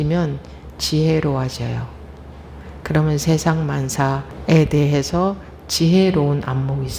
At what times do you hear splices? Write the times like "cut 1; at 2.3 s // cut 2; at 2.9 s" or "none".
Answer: cut 1; at 4.3 s